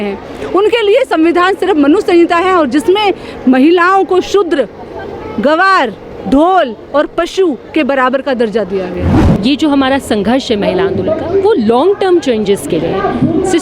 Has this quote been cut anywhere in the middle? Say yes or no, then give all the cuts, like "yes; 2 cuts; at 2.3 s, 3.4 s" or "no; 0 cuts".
yes; 1 cut; at 9.1 s